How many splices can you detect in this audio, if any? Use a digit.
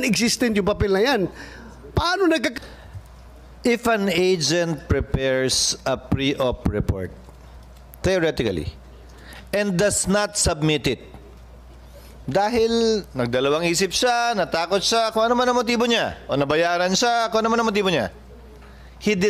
1